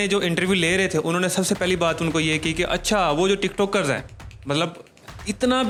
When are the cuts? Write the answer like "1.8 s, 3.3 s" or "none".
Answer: none